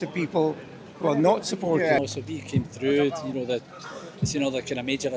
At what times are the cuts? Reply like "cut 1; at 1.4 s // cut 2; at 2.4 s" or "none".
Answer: cut 1; at 2.0 s